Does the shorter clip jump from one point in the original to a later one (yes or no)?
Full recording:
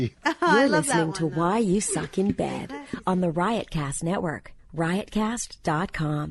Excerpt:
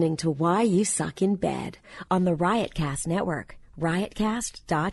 no